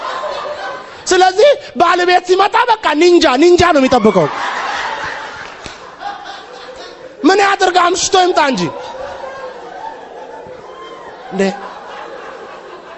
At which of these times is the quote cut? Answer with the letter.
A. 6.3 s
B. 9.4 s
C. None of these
C